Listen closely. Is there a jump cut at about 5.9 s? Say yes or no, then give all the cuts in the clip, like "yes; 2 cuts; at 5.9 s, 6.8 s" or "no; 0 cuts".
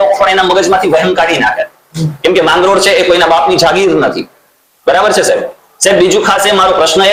no; 0 cuts